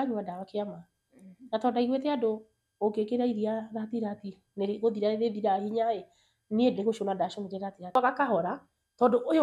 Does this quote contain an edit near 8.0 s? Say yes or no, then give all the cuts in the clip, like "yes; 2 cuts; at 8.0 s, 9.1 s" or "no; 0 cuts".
yes; 1 cut; at 8.0 s